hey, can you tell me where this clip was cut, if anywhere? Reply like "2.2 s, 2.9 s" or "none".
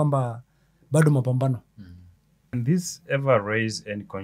2.5 s